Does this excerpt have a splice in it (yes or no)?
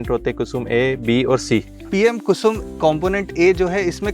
yes